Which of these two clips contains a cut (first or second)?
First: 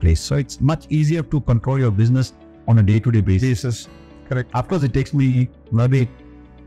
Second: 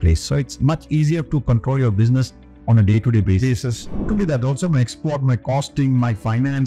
second